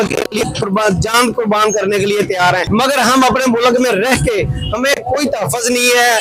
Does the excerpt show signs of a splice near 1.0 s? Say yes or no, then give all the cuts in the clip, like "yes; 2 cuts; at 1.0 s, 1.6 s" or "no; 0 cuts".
no; 1 cut; at 2.7 s